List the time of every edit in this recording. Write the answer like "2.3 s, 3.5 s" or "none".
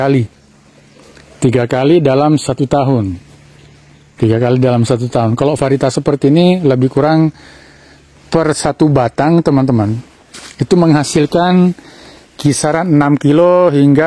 none